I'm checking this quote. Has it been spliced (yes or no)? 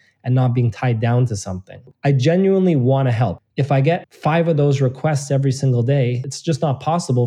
yes